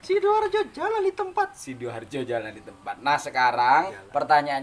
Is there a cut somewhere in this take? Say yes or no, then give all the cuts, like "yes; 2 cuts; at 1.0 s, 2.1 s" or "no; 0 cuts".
no; 0 cuts